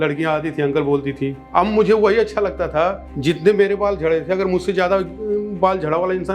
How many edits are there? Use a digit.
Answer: 1